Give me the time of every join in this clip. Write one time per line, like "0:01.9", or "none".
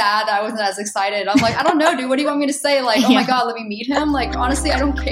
none